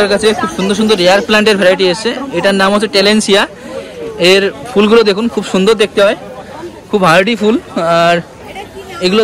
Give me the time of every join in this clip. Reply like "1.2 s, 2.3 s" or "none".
none